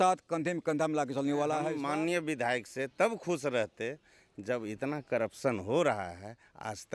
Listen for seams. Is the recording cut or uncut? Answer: cut